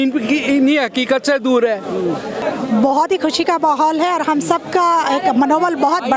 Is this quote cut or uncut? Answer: cut